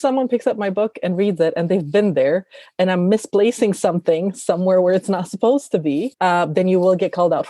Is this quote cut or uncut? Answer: uncut